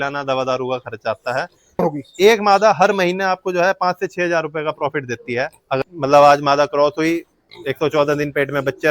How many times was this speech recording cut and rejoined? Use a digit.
2